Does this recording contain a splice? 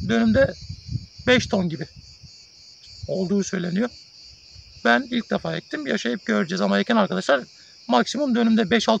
no; 0 cuts

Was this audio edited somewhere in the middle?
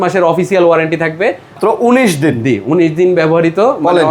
yes; 1 cut; at 1.5 s

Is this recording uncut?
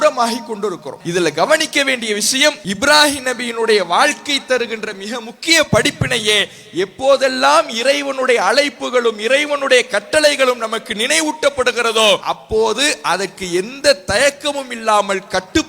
no; 3 cuts; at 0.9 s, 2.7 s, 12.2 s

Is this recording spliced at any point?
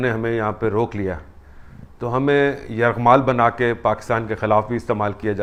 no; 0 cuts

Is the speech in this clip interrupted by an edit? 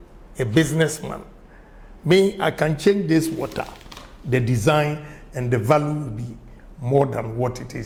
no; 0 cuts

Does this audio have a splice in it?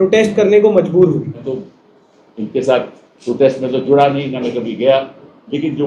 yes; 1 cut; at 1.4 s

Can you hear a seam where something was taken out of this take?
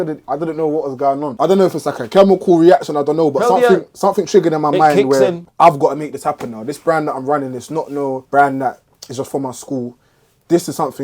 yes; 2 cuts; at 1.3 s, 8.2 s

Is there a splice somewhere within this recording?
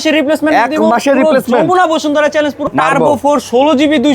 yes; 1 cut; at 2.7 s

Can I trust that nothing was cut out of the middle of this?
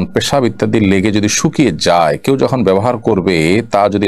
yes; 0 cuts

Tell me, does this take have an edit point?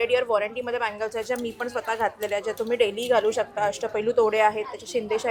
no; 0 cuts

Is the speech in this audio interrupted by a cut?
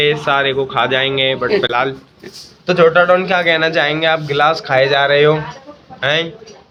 no; 0 cuts

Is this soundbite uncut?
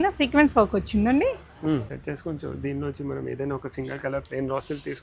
no; 1 cut; at 1.9 s

